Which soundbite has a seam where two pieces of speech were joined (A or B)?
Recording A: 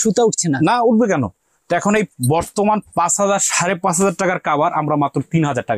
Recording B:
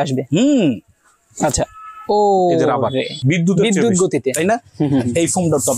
B